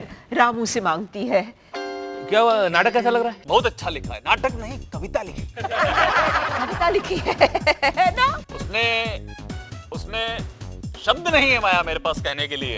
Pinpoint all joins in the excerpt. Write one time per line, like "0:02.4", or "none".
0:01.6
0:03.4
0:08.4